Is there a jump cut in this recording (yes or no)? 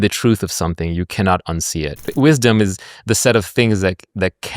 yes